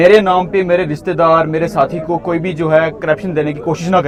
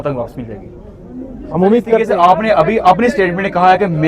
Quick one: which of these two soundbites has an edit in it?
second; 1 cut; at 2.0 s

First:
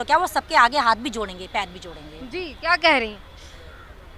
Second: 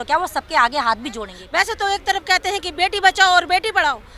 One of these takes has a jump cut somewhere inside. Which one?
second; 1 cut; at 1.3 s

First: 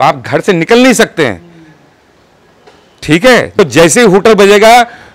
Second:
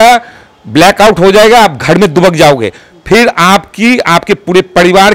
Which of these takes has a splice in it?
first; 1 cut; at 3.5 s

